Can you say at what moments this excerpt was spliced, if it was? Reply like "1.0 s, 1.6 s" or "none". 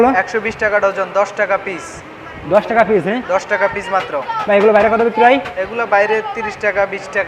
none